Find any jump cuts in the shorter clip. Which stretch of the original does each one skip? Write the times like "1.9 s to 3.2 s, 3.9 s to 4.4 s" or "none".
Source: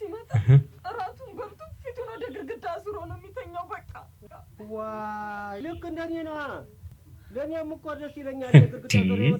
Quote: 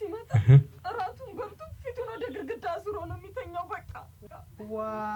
none